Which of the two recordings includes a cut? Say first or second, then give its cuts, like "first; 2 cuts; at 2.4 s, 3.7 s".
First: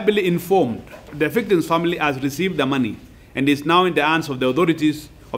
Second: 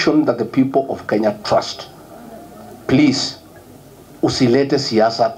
first; 1 cut; at 1.1 s